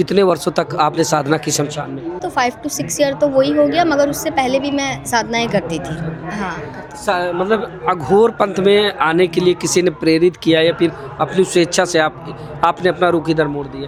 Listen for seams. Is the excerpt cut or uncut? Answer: uncut